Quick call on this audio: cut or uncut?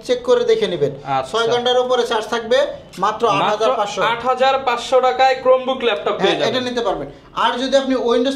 uncut